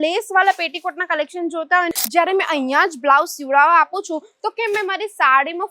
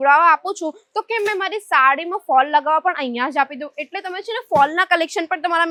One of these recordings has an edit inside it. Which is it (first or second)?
first